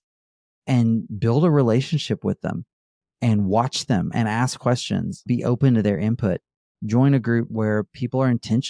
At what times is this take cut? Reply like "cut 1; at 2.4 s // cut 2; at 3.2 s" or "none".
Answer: cut 1; at 5.2 s // cut 2; at 7.5 s